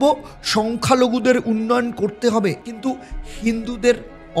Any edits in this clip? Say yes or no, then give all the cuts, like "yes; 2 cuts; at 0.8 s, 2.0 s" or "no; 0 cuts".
yes; 1 cut; at 2.7 s